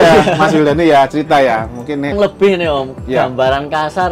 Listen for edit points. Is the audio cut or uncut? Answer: cut